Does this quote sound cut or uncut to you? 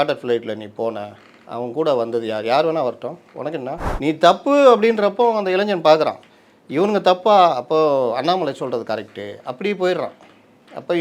cut